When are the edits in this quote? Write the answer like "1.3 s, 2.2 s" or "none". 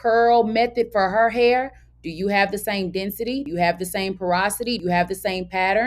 3.5 s, 4.8 s